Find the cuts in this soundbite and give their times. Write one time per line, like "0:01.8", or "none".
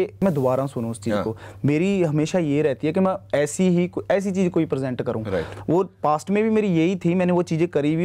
none